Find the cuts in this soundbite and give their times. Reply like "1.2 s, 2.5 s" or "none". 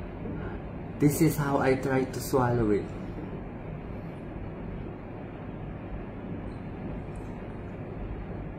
none